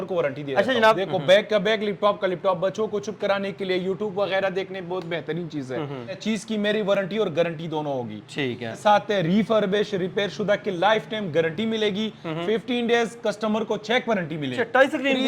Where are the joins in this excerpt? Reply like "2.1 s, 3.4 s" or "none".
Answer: 1.0 s, 6.2 s, 8.7 s, 14.5 s